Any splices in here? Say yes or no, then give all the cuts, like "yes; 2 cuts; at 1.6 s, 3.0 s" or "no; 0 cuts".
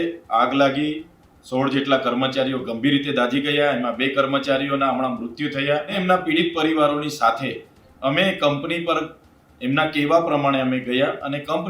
yes; 1 cut; at 6.0 s